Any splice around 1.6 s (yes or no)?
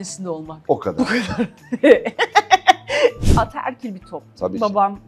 no